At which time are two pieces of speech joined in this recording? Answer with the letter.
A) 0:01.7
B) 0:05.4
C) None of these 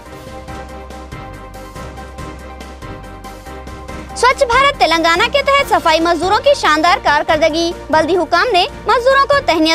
A